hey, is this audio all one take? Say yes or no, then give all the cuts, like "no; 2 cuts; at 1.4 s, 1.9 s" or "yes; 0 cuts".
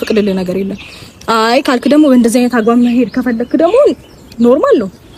yes; 0 cuts